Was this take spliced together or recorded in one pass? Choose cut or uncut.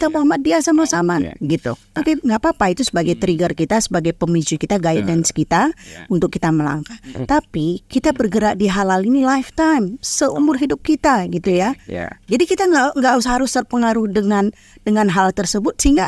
cut